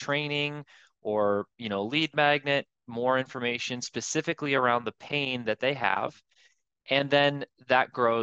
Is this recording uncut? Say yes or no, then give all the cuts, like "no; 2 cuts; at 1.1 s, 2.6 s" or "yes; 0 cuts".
yes; 0 cuts